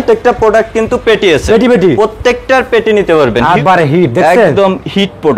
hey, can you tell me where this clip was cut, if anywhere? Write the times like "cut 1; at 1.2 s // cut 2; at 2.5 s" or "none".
cut 1; at 3.6 s